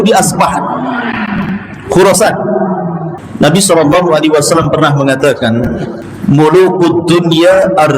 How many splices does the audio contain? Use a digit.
1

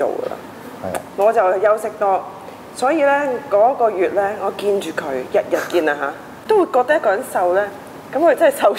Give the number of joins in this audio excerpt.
0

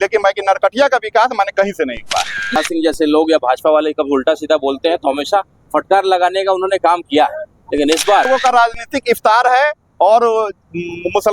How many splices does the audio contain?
2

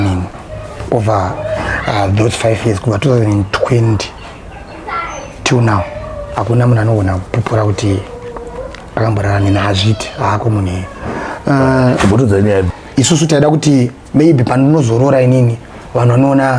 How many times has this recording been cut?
1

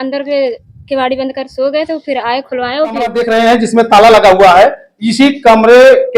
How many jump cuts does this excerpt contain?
1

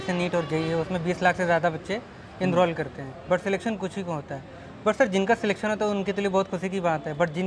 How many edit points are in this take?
0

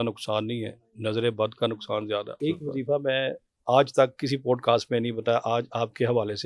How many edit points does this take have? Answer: 1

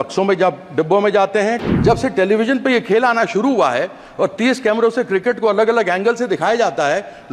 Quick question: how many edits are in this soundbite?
1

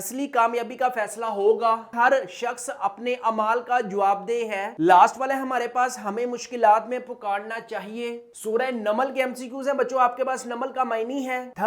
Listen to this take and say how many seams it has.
2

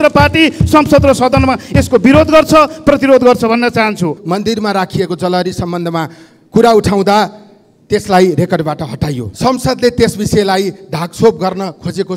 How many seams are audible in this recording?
2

